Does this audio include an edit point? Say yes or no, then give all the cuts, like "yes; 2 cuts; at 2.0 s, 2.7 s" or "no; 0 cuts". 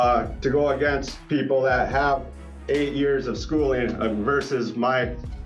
no; 0 cuts